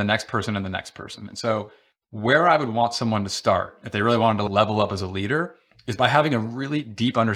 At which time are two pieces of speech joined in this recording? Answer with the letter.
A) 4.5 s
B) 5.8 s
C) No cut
A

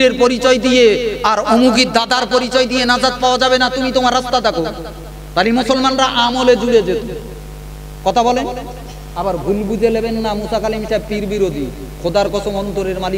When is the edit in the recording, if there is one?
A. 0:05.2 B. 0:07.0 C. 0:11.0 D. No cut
D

